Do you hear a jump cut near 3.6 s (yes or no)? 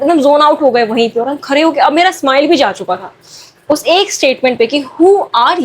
no